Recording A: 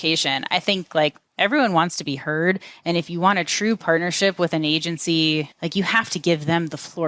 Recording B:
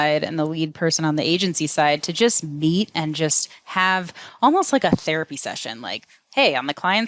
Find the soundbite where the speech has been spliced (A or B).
A